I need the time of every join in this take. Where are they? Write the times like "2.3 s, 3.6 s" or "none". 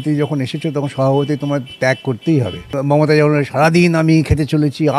2.8 s